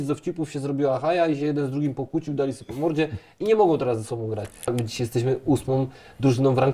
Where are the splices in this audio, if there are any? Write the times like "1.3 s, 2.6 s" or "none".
4.7 s